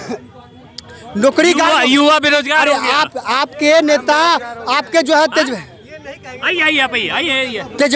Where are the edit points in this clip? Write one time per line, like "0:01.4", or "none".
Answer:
none